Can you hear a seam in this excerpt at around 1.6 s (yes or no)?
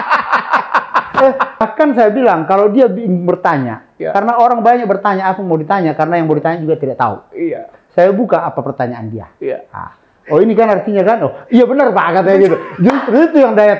yes